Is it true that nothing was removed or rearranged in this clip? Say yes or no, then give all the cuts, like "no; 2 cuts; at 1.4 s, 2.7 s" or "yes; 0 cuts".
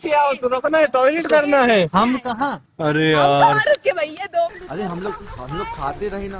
no; 1 cut; at 4.6 s